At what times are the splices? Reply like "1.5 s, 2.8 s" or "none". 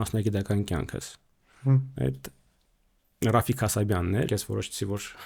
1.9 s, 4.3 s